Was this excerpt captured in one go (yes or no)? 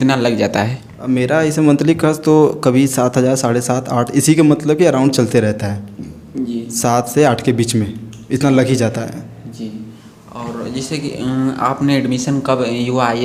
yes